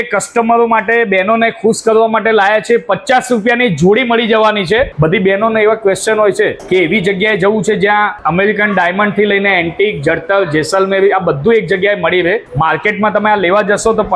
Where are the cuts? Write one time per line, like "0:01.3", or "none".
0:04.9
0:06.6
0:08.2
0:12.5